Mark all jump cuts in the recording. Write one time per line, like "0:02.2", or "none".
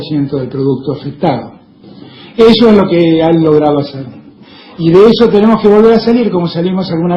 0:03.7